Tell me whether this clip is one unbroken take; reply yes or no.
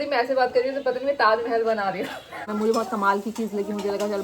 no